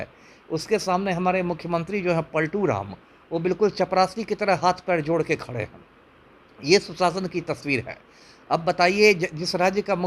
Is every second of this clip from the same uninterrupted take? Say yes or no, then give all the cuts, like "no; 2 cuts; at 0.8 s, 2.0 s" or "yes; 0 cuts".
yes; 0 cuts